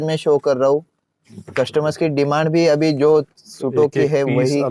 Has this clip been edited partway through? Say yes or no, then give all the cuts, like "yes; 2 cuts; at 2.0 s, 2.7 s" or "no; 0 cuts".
no; 0 cuts